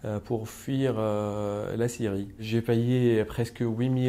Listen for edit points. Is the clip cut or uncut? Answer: cut